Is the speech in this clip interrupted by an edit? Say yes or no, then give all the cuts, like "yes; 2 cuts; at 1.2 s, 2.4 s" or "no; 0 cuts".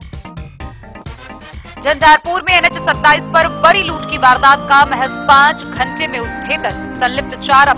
no; 0 cuts